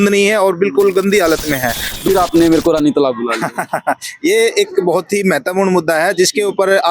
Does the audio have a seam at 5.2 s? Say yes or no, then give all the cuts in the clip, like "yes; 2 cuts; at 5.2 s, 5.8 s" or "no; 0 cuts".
no; 1 cut; at 2.0 s